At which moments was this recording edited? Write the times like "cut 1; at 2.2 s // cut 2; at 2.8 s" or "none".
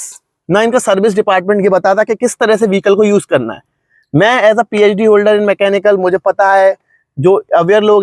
none